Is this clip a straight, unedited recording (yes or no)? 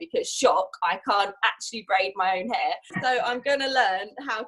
no